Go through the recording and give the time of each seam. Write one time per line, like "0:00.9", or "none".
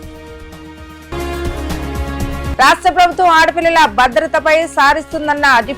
0:01.0
0:02.5